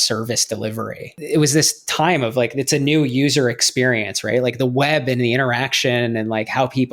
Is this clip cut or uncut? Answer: cut